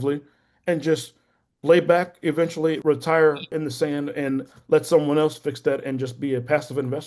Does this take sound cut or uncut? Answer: cut